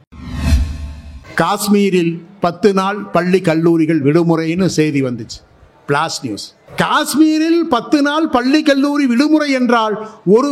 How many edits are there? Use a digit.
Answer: 1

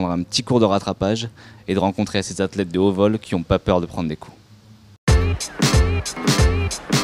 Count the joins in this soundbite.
1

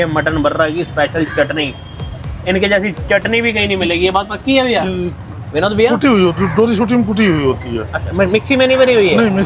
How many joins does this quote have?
0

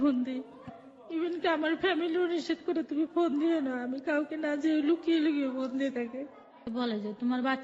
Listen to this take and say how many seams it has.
1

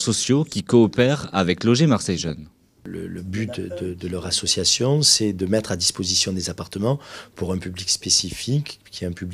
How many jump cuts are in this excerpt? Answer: 1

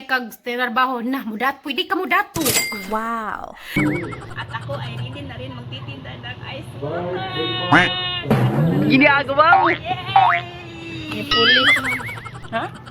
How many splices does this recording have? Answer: 1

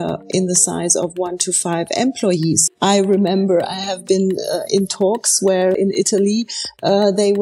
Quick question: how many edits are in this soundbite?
2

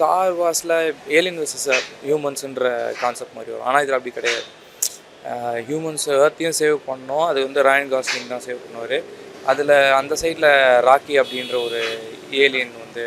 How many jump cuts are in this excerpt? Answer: 0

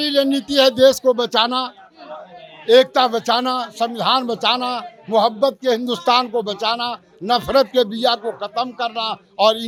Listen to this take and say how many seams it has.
0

